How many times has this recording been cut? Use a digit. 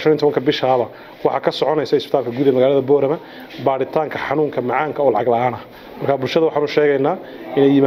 0